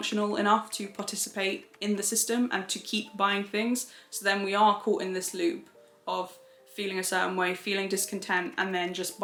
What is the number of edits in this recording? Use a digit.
0